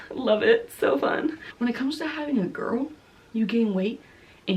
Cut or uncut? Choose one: cut